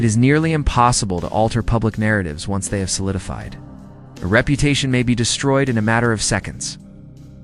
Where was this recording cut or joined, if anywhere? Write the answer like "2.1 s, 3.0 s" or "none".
1.7 s, 2.8 s